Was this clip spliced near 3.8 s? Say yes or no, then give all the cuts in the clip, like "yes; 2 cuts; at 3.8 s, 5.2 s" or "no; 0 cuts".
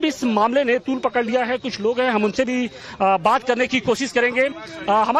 yes; 1 cut; at 3.8 s